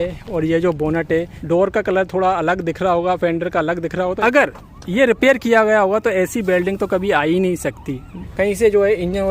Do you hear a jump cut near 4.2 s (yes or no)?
yes